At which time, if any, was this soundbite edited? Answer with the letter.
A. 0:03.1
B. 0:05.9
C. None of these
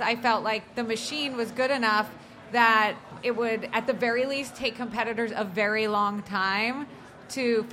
A